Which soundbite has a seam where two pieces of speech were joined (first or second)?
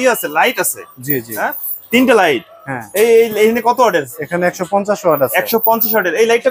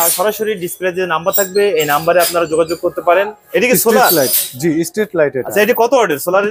second